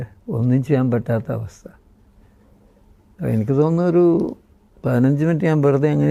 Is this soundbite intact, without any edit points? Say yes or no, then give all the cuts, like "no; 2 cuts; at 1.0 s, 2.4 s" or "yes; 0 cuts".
yes; 0 cuts